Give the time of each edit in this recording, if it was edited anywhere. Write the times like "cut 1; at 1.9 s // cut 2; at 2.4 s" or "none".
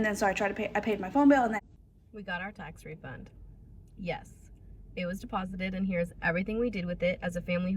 cut 1; at 1.6 s